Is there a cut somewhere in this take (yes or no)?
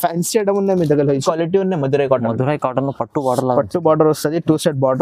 yes